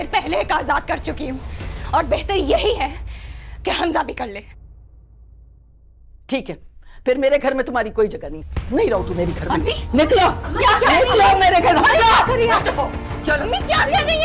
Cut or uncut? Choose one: uncut